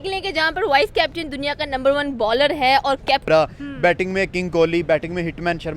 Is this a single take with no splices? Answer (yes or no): no